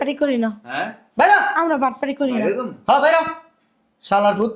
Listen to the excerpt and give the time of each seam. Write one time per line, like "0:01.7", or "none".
none